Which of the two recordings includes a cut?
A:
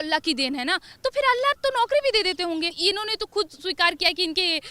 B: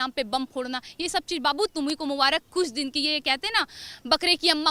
A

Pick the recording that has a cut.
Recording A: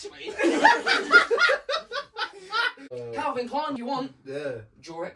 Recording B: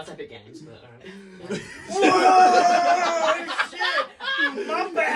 A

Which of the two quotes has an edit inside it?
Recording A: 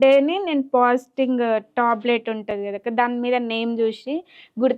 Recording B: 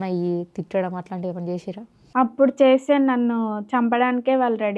B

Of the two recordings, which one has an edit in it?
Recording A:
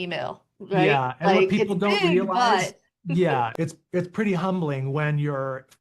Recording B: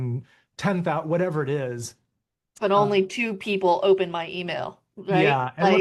A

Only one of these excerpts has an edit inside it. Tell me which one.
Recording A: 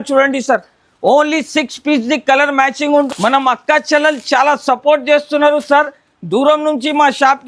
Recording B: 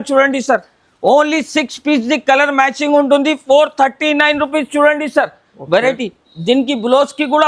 A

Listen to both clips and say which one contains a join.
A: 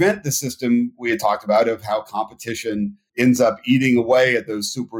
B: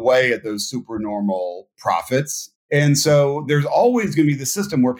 B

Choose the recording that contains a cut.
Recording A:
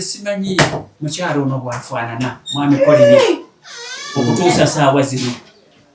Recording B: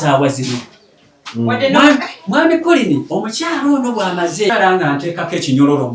B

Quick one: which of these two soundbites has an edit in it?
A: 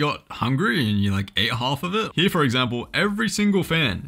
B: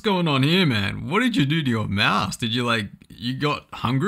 A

